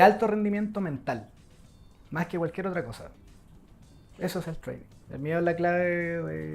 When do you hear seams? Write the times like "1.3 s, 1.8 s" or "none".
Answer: 4.9 s

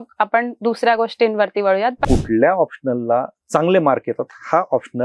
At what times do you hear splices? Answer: 2.0 s

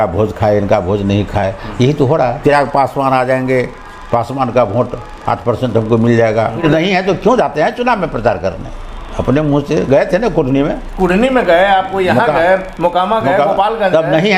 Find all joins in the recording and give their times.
2.4 s, 6.6 s

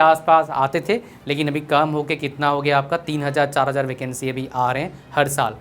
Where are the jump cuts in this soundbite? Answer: none

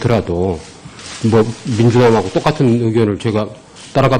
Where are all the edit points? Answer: 1.6 s

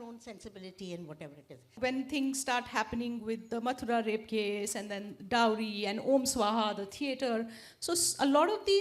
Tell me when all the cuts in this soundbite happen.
1.7 s

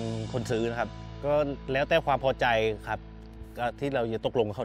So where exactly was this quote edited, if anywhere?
1.0 s

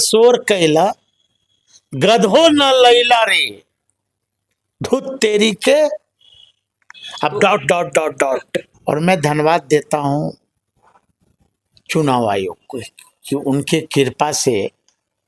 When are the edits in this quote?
8.6 s

